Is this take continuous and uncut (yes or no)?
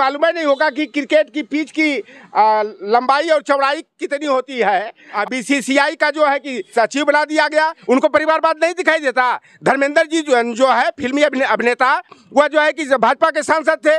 no